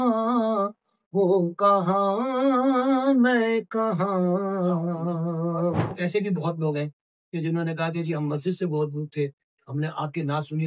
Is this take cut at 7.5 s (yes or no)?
no